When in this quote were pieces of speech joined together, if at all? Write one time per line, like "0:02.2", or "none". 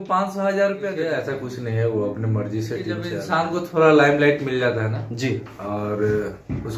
0:01.2
0:03.2